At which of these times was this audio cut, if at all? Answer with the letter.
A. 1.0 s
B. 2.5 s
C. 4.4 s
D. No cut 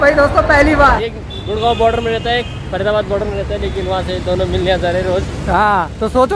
A